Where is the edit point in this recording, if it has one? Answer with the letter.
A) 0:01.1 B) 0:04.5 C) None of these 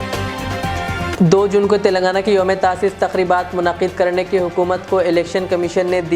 A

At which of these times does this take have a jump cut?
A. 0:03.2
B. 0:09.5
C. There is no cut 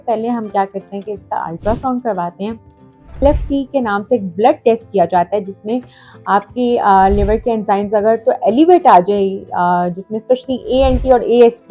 A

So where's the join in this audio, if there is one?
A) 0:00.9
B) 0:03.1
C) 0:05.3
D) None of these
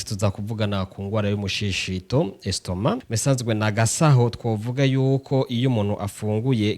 B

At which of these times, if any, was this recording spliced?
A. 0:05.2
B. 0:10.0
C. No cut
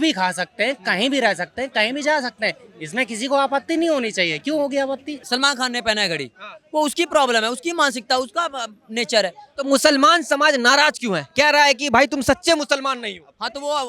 A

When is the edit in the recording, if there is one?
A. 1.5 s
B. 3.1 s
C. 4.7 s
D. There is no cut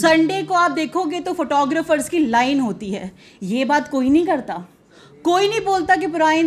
D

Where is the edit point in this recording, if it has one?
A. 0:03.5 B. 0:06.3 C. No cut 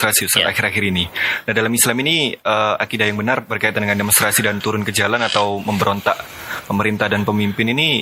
C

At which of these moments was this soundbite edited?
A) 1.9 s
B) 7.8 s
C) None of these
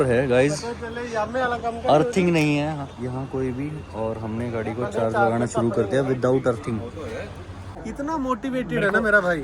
B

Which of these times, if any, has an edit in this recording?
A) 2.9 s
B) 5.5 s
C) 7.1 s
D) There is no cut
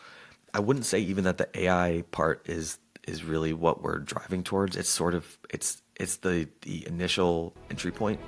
D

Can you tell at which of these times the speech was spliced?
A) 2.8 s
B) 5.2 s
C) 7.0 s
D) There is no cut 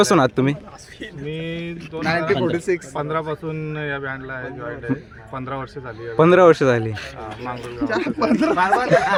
D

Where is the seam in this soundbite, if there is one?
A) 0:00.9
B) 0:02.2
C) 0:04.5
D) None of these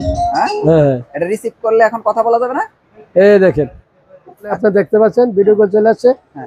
C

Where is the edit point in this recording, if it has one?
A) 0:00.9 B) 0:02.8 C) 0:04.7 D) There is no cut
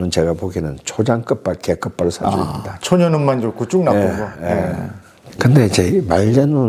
D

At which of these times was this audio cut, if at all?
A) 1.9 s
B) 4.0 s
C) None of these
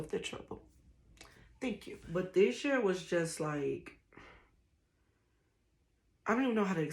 A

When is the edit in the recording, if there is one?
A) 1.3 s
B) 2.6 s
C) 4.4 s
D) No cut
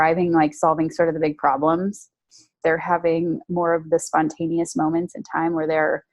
B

